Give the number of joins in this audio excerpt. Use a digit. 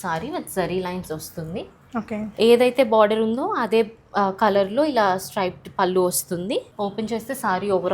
1